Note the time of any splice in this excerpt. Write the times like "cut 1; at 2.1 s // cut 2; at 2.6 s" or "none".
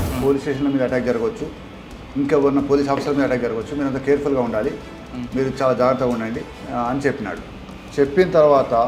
cut 1; at 6.5 s